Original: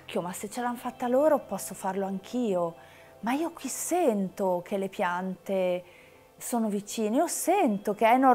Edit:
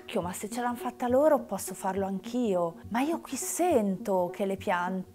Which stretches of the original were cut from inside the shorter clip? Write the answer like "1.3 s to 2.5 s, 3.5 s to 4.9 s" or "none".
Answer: 2.8 s to 3.1 s